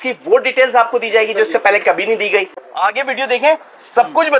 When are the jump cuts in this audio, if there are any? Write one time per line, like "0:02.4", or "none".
0:02.6